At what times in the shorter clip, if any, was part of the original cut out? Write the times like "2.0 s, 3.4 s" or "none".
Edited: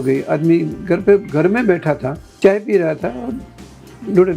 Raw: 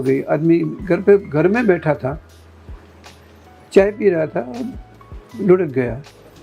2.2 s